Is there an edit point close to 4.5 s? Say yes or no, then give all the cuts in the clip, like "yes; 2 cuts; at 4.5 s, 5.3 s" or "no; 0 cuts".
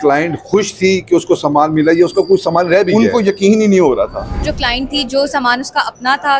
yes; 1 cut; at 4.5 s